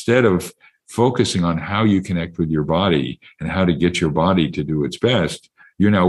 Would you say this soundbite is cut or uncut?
uncut